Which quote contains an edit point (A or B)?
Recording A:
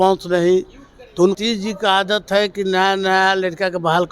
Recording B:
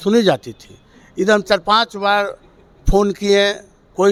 A